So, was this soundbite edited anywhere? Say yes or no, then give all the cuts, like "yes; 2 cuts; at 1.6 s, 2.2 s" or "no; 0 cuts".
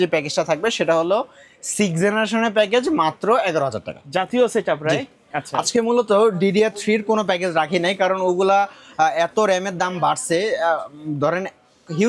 no; 0 cuts